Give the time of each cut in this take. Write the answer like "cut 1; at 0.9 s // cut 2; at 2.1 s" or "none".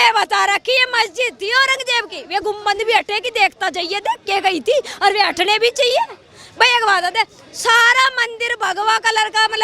none